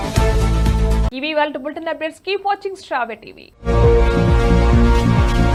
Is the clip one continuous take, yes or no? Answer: yes